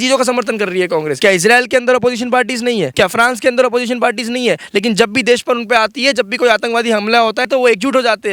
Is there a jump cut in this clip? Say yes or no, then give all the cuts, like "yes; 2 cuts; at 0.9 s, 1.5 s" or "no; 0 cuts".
yes; 3 cuts; at 1.1 s, 2.9 s, 7.5 s